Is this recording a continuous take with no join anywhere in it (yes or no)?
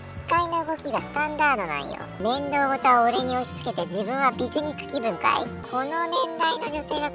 no